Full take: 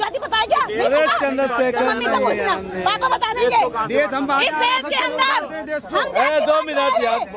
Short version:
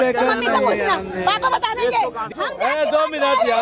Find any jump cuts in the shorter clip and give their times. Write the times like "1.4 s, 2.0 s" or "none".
2.3 s